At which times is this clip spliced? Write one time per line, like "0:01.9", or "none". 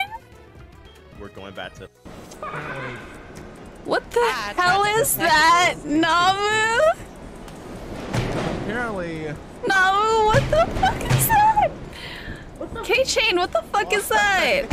0:02.0